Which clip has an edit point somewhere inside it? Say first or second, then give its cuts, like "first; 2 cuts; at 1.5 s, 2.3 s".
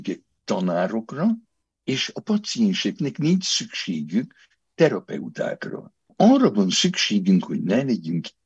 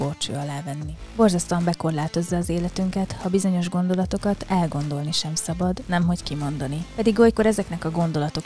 first; 2 cuts; at 6.1 s, 7.7 s